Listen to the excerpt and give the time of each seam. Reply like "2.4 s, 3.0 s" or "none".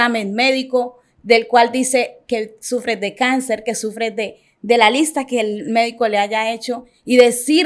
none